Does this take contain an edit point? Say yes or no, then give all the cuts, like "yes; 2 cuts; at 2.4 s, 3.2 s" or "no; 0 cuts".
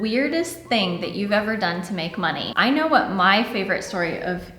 yes; 1 cut; at 2.5 s